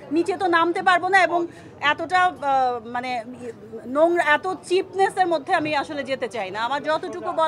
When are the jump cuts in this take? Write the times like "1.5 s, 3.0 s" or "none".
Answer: none